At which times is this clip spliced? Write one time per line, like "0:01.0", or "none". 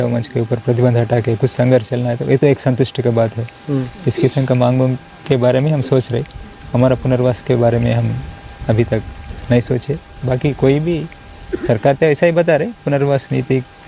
none

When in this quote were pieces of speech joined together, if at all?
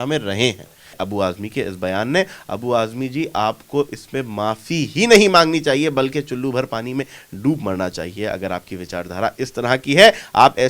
0:01.0

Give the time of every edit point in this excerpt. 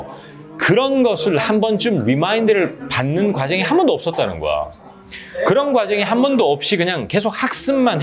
none

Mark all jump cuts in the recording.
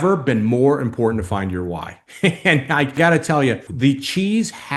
0:03.7

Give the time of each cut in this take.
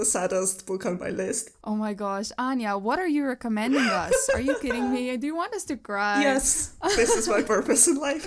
none

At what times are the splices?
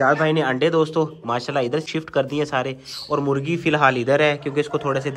none

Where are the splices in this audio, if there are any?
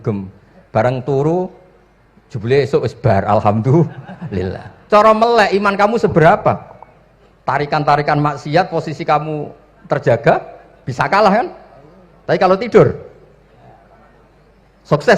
none

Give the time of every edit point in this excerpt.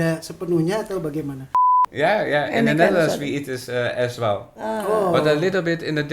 0:01.9

